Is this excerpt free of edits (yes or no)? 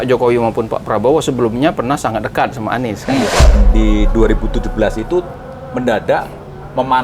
no